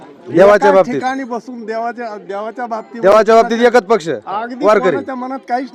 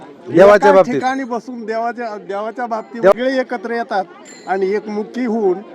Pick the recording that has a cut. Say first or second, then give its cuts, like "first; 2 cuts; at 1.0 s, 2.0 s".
second; 1 cut; at 3.1 s